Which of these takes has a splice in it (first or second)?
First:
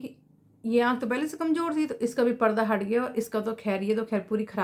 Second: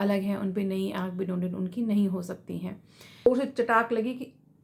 second